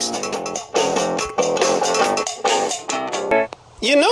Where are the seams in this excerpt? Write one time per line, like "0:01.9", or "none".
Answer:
0:02.7